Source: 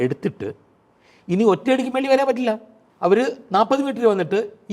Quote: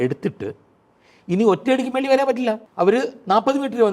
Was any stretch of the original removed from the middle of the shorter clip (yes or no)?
yes